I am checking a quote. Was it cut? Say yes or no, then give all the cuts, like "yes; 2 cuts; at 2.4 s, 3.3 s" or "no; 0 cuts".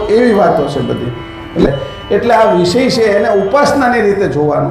yes; 1 cut; at 1.7 s